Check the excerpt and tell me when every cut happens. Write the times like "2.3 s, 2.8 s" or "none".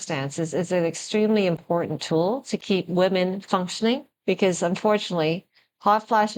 4.1 s